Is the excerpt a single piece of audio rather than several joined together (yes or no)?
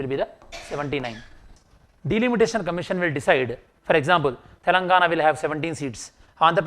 no